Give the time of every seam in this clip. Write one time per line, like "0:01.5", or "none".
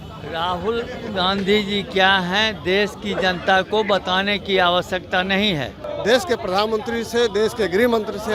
0:05.9